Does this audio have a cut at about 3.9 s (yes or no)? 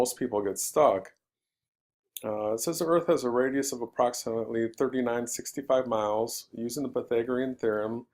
no